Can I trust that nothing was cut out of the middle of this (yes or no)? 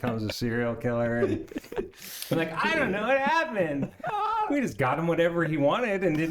yes